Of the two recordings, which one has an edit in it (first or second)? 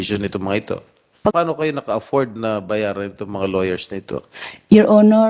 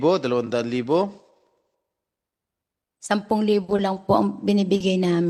first